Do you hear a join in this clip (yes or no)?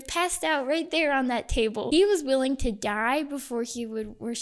yes